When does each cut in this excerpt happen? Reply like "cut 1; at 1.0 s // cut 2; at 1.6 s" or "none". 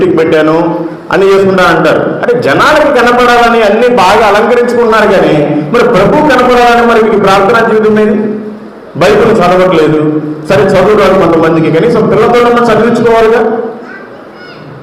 none